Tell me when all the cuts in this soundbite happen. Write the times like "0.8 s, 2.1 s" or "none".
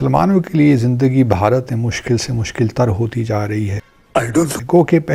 none